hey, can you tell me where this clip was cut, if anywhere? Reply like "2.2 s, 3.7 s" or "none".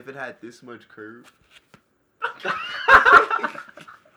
none